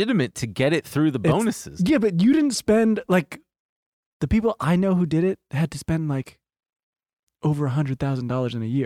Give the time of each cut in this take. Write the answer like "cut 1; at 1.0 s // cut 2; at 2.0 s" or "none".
cut 1; at 1.7 s